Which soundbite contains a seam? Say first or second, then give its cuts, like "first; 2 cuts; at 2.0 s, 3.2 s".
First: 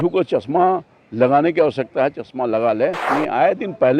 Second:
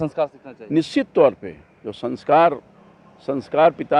first; 1 cut; at 3.0 s